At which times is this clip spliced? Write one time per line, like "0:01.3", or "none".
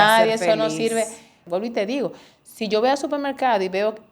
0:01.4